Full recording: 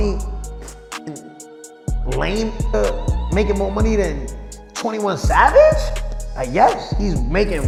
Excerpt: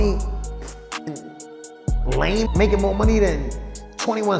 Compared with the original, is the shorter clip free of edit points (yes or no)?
no